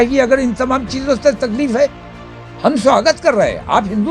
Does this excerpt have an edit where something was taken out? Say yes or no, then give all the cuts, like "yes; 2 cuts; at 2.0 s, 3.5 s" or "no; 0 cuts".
no; 0 cuts